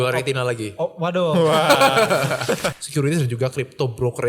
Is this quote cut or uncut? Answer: cut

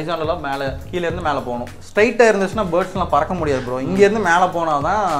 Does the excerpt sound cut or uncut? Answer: cut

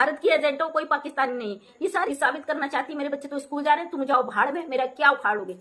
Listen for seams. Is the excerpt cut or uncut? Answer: cut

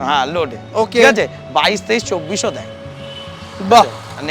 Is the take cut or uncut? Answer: uncut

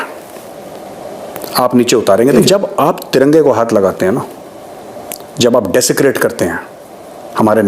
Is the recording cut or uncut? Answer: cut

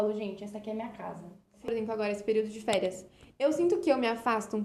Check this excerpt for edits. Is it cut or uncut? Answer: cut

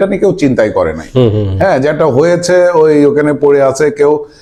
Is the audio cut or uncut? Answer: uncut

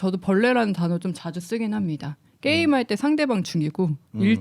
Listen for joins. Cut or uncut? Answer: uncut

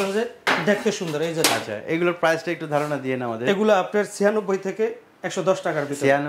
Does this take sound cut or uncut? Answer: uncut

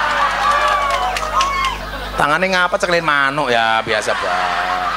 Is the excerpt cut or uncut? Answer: cut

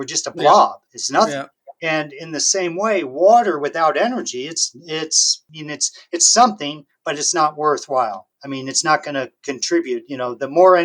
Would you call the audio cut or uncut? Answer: cut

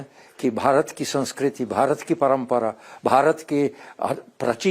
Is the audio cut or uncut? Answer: uncut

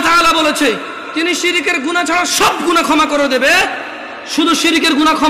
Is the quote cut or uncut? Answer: uncut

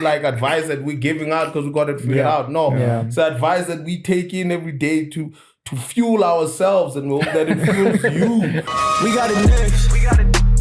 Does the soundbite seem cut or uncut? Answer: cut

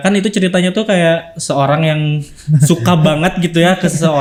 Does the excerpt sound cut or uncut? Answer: uncut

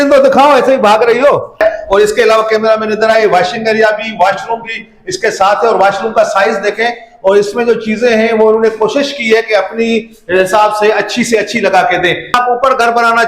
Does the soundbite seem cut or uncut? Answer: cut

